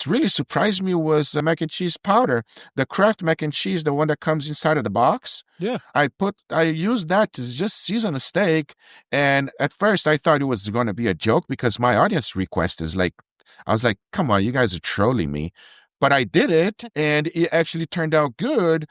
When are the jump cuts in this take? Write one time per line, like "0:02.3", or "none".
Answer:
0:01.4
0:05.9

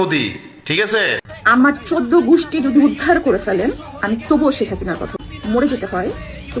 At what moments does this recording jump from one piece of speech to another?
0:01.4
0:05.6

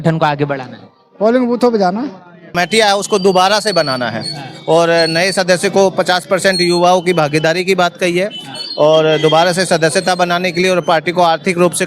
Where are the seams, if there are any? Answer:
0:02.5

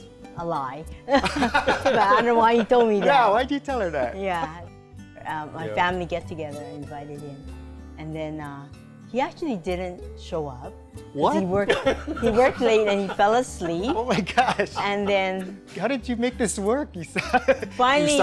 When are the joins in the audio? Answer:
none

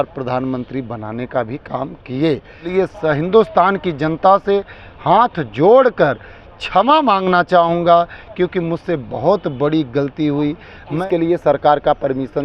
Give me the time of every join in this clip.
0:02.6
0:11.0

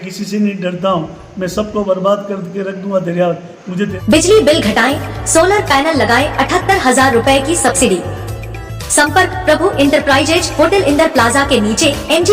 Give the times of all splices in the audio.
0:03.9

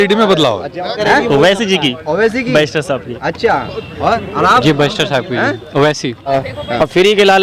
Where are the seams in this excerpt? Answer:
0:00.9
0:06.3

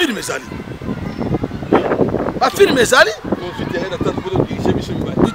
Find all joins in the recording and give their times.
none

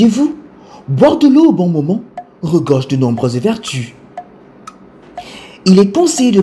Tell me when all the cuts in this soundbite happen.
none

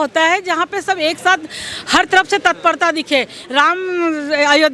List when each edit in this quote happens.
0:03.4

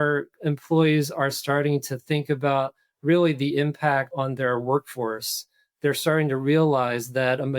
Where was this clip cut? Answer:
0:04.1

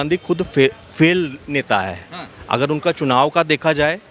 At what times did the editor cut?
none

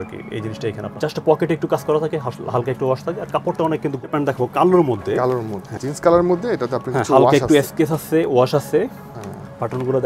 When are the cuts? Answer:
0:00.9
0:04.0
0:05.8

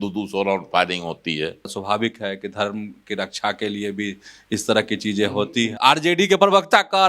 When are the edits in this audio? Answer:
0:01.7
0:05.7

